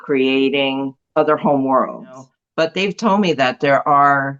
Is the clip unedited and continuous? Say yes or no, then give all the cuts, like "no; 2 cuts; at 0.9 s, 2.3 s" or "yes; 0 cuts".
no; 2 cuts; at 1.0 s, 2.4 s